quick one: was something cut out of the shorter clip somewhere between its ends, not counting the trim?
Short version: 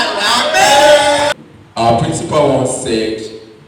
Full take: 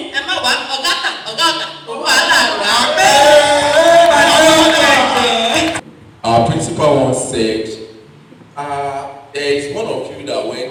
yes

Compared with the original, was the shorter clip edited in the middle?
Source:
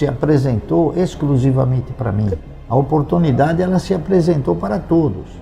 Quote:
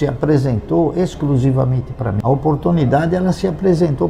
yes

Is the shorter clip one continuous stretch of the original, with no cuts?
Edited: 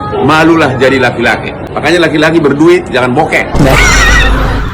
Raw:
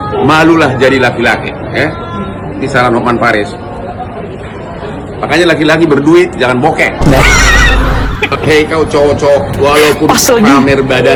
no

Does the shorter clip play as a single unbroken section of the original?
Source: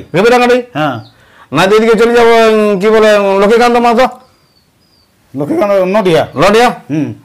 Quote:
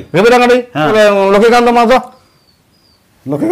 no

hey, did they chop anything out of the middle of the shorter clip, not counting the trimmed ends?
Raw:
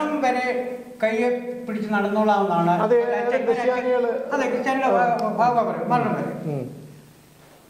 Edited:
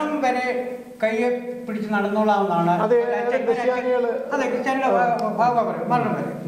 no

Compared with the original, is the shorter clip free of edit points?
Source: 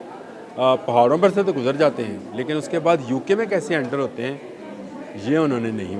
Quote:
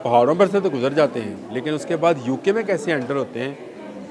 yes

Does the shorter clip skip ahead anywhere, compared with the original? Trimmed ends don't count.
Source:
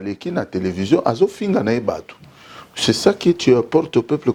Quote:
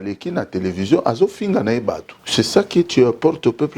yes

